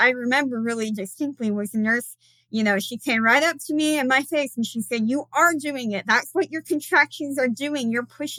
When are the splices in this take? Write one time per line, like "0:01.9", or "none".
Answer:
none